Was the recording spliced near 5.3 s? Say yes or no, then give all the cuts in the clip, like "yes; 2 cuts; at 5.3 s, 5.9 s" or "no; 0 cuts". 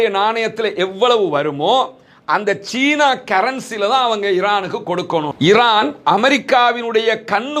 yes; 1 cut; at 5.3 s